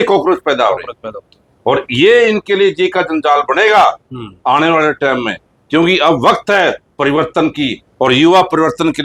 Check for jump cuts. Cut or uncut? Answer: uncut